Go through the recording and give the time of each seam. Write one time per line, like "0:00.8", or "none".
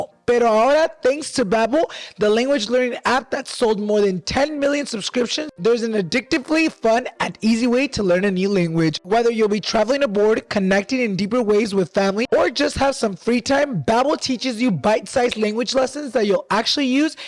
none